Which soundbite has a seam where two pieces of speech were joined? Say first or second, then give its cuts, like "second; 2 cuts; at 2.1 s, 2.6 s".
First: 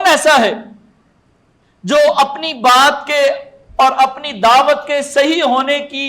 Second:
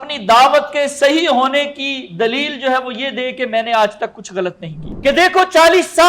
second; 1 cut; at 4.8 s